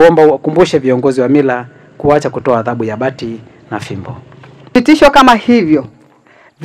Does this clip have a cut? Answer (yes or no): yes